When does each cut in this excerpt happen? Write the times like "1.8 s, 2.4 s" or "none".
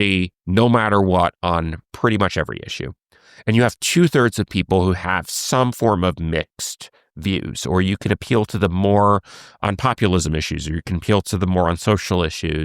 none